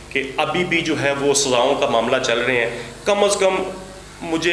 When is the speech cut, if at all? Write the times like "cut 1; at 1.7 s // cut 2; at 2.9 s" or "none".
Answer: none